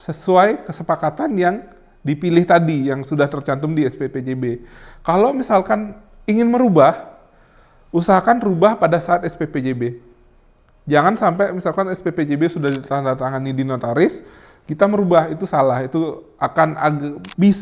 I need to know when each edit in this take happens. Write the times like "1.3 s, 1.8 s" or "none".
none

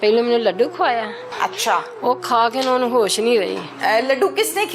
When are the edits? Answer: 1.2 s, 3.6 s

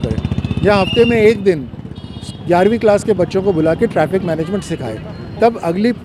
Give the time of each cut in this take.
none

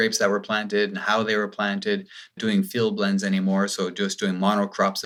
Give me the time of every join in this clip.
none

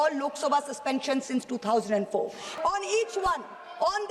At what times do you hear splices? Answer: 2.4 s

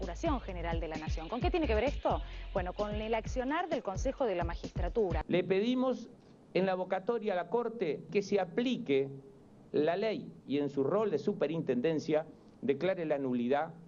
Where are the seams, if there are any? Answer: none

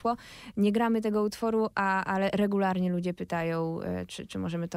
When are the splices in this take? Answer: none

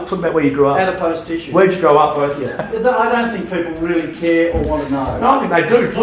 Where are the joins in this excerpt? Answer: none

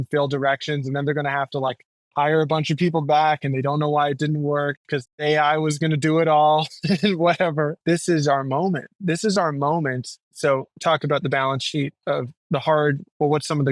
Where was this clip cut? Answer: 5.1 s, 7.8 s, 10.3 s

